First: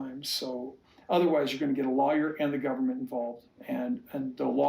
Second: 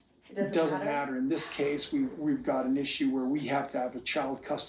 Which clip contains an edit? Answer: first; 1 cut; at 3.5 s

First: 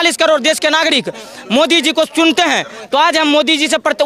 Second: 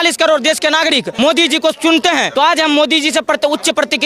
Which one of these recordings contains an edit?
second; 2 cuts; at 1.1 s, 2.3 s

